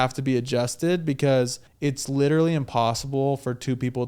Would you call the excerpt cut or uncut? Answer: cut